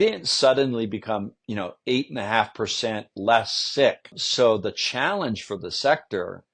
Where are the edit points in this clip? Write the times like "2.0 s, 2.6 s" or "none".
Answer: 4.2 s